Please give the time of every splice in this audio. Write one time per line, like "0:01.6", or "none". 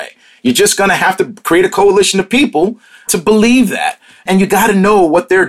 none